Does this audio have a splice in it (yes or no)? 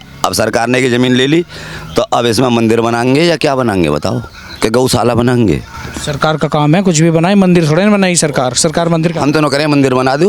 no